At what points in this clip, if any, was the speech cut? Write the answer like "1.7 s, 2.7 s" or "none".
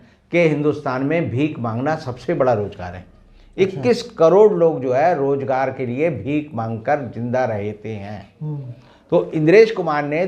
none